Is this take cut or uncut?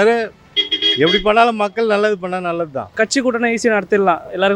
cut